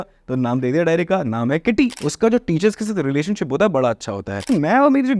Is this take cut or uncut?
cut